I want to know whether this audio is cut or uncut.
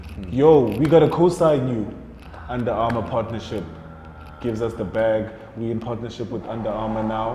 uncut